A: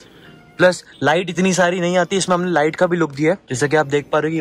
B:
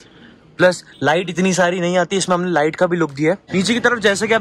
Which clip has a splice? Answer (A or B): B